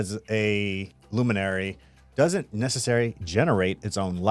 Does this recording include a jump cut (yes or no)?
yes